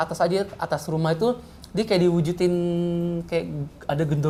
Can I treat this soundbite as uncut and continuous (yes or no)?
yes